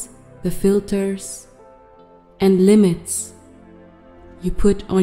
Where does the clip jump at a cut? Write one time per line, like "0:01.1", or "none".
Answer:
none